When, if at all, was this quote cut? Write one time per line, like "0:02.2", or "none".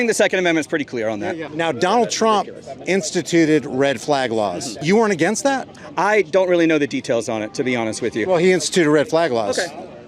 0:01.5
0:04.8